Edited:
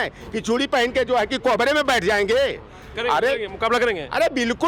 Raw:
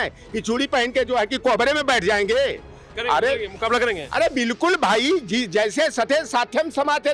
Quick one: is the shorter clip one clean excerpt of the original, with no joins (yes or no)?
yes